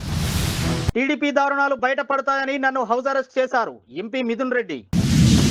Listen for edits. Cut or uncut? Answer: uncut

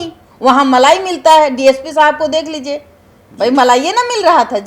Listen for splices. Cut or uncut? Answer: uncut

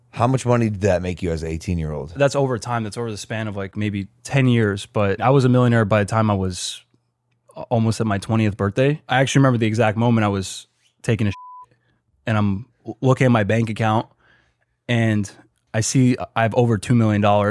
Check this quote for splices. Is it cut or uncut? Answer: cut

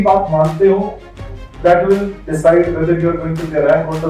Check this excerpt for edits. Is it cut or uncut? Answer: uncut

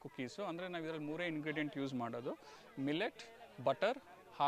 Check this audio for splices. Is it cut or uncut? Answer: uncut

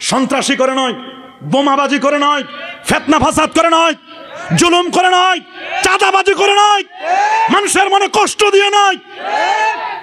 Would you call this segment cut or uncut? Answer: uncut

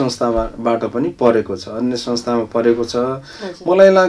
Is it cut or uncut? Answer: uncut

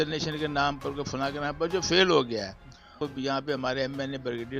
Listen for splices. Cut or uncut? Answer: cut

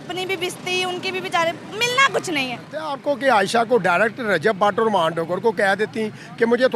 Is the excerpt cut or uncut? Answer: cut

